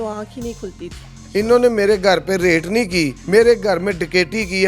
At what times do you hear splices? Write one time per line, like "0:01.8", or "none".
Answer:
0:01.1
0:03.2